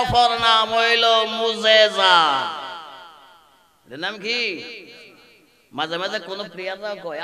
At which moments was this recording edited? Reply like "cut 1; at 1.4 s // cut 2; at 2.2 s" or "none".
none